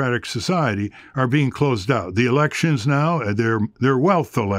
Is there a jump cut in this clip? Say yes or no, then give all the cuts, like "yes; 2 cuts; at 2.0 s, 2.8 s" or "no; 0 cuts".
no; 0 cuts